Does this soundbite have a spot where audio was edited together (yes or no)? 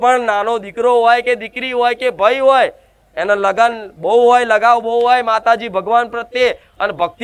no